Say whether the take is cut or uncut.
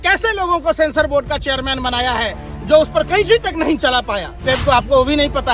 cut